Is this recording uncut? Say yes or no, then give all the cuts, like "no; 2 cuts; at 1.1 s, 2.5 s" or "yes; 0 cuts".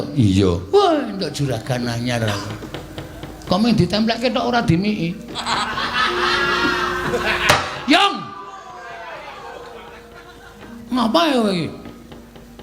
no; 1 cut; at 2.3 s